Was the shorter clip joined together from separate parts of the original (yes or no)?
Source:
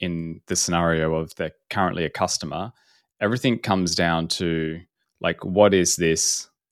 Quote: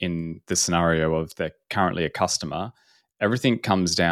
no